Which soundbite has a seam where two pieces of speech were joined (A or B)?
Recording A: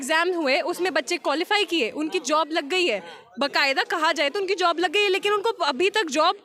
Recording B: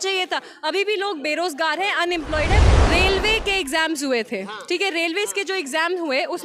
B